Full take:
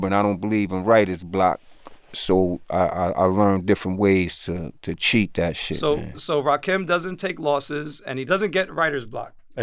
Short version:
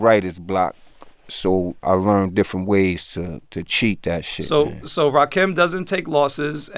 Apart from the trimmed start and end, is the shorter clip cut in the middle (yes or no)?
yes